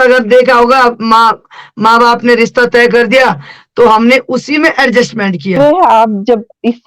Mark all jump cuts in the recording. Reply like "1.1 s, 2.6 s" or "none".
5.6 s